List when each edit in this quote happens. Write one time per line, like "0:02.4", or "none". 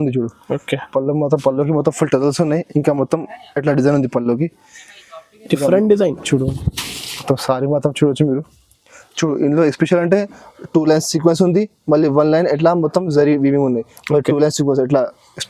none